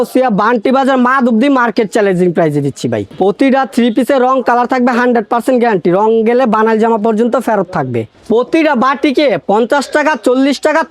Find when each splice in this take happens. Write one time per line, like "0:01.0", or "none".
0:03.1
0:08.1

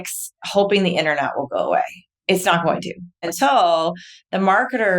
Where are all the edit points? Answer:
0:02.1
0:03.2

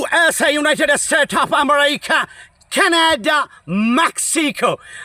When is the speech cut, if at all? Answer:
none

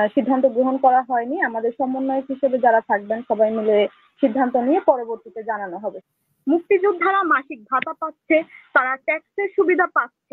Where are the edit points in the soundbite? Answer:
0:06.0

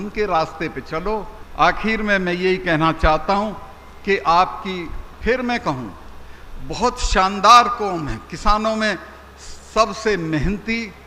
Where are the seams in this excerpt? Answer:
none

